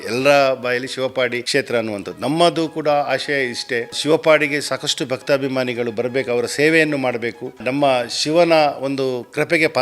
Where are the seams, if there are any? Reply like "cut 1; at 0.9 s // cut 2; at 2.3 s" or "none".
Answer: cut 1; at 1.4 s // cut 2; at 4.0 s // cut 3; at 7.6 s